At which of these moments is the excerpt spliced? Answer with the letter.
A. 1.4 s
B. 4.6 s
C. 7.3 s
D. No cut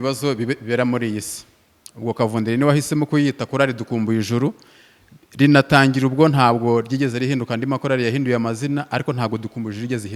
D